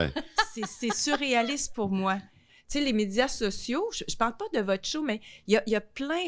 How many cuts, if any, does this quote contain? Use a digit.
1